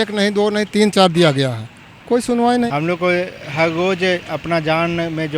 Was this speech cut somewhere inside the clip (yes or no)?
yes